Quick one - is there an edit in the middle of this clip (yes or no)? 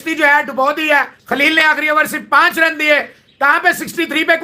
no